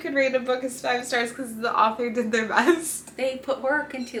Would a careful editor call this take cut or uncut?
uncut